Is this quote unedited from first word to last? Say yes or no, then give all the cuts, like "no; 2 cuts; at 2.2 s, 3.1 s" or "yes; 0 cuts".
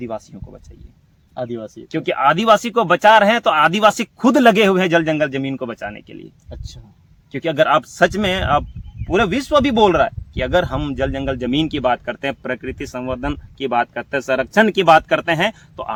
yes; 0 cuts